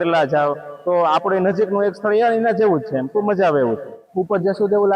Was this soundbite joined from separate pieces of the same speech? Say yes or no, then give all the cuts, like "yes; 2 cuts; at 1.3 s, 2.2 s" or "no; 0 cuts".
yes; 1 cut; at 4.0 s